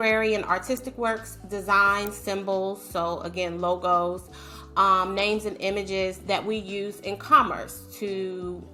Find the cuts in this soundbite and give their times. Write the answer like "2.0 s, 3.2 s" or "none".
none